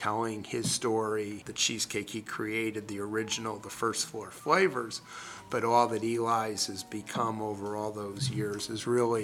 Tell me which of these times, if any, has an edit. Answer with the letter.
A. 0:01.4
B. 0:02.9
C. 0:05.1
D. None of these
A